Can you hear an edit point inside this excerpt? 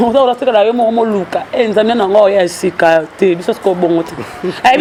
no; 0 cuts

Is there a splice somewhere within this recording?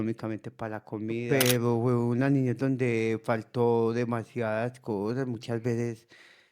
yes; 1 cut; at 1.2 s

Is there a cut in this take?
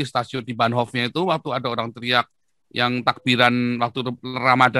no; 0 cuts

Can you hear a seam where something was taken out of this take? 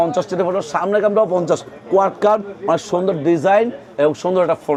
no; 0 cuts

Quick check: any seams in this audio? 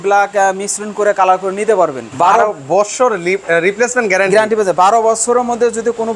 yes; 1 cut; at 2.0 s

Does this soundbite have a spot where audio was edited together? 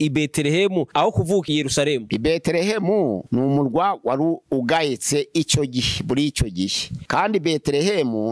no; 0 cuts

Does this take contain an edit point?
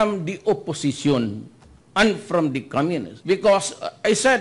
yes; 1 cut; at 3.1 s

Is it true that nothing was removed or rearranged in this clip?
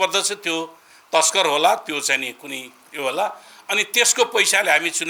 yes; 0 cuts

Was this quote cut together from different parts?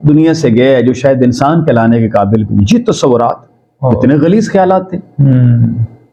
no; 0 cuts

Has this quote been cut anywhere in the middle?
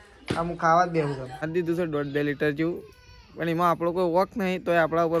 yes; 1 cut; at 1.5 s

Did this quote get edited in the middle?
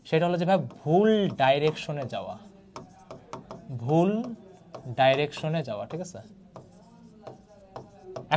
no; 0 cuts

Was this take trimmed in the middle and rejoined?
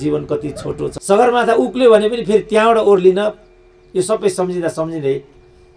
yes; 1 cut; at 0.9 s

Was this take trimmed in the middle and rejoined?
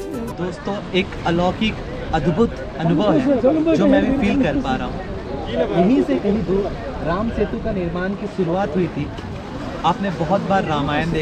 no; 0 cuts

